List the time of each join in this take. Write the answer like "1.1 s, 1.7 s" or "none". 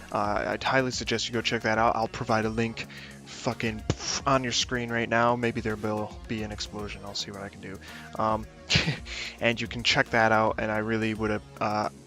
11.2 s